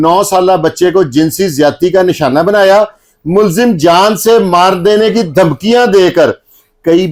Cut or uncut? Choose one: uncut